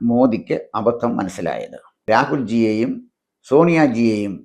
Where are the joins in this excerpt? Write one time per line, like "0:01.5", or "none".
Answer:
0:02.1